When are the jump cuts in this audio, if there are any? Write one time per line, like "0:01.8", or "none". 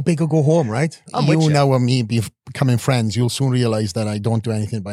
0:01.0